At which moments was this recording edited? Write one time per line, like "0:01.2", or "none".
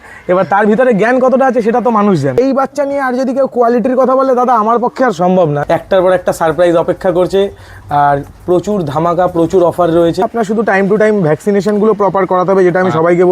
0:02.4
0:05.6
0:10.3